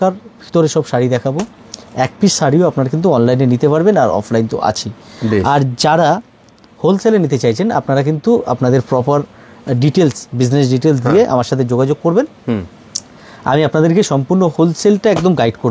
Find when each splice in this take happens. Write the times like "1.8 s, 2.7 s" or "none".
none